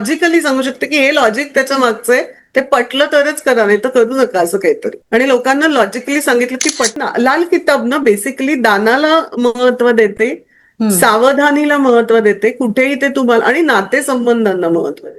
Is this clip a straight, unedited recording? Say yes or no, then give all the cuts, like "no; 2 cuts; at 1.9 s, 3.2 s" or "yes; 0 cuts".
no; 1 cut; at 7.0 s